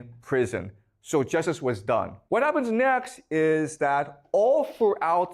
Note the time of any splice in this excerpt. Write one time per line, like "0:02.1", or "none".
0:02.2